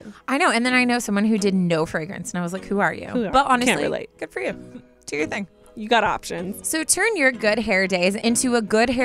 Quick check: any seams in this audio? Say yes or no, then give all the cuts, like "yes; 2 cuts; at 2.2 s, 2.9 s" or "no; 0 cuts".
yes; 1 cut; at 6.6 s